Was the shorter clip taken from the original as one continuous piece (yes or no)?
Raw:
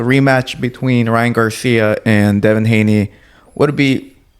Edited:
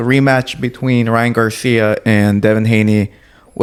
yes